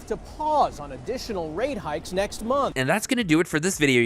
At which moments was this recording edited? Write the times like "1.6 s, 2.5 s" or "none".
none